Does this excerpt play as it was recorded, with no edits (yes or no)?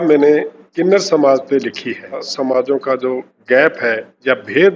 no